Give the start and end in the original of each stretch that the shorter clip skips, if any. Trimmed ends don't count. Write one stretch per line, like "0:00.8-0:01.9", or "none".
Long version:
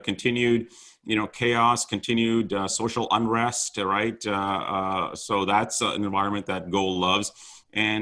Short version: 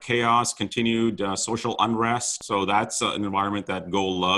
0:03.7-0:05.1